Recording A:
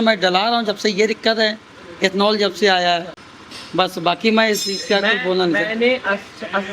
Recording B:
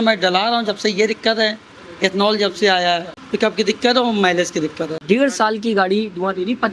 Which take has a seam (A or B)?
B